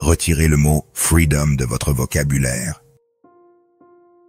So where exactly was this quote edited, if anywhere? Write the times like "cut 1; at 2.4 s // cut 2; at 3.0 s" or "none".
cut 1; at 3.0 s